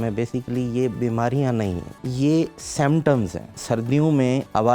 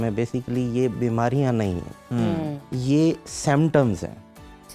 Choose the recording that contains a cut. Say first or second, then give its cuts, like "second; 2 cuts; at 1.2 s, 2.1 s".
first; 2 cuts; at 1.9 s, 4.0 s